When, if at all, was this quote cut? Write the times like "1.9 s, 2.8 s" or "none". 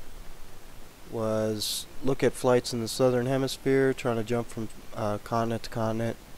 none